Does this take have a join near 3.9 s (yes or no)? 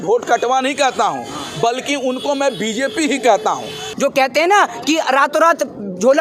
yes